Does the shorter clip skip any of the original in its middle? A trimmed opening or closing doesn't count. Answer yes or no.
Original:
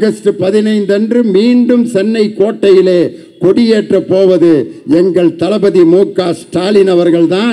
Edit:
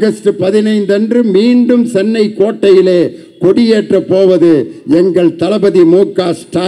no